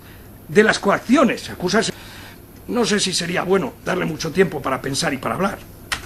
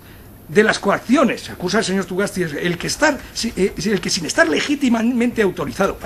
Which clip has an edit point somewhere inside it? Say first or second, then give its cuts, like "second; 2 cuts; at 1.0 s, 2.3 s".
second; 1 cut; at 1.9 s